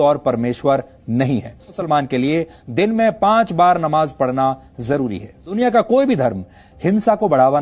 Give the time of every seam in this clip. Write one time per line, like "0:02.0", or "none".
0:01.8
0:05.5